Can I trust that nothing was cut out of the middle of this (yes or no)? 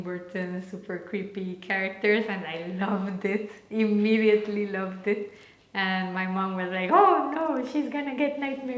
yes